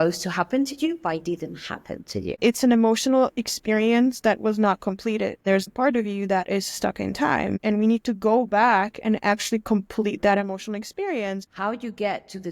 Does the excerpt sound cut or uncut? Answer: cut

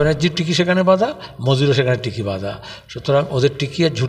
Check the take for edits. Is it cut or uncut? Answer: uncut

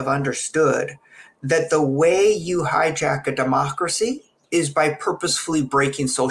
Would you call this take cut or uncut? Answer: uncut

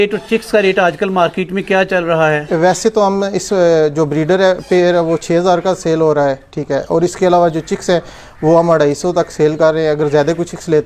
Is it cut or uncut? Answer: uncut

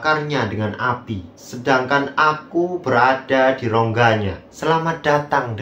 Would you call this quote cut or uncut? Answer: cut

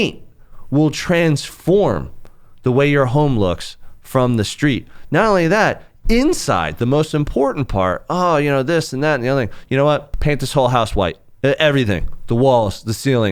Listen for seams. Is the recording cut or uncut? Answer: cut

